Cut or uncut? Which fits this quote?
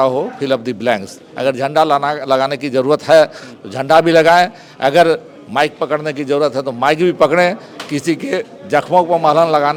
uncut